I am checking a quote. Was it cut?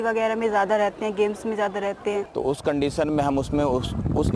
yes; 1 cut; at 2.3 s

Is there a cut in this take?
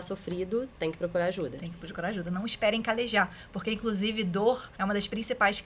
yes; 1 cut; at 4.7 s

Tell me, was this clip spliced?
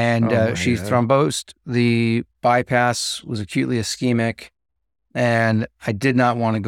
no; 0 cuts

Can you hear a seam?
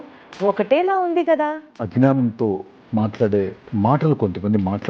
yes; 2 cuts; at 1.7 s, 3.6 s

